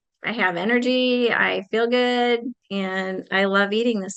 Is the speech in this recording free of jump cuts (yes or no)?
no